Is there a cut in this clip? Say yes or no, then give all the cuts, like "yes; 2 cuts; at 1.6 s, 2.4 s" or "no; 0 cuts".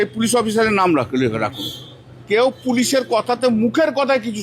yes; 1 cut; at 2.1 s